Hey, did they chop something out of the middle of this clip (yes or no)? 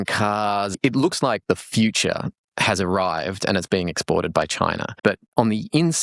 yes